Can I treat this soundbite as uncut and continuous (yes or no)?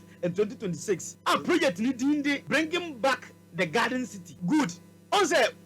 no